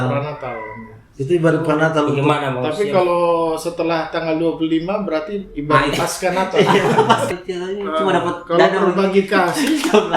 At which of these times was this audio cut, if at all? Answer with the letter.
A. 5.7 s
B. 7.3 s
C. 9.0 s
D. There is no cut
B